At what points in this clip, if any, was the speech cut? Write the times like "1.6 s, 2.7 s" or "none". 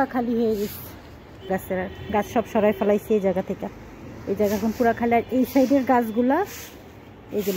1.5 s